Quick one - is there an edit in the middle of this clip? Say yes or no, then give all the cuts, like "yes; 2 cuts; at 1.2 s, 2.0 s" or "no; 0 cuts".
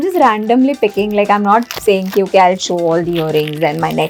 no; 0 cuts